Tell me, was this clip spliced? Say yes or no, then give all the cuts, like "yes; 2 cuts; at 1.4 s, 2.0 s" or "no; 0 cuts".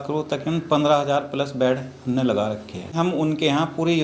yes; 1 cut; at 3.0 s